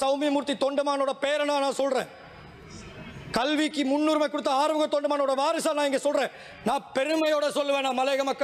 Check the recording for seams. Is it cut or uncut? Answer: uncut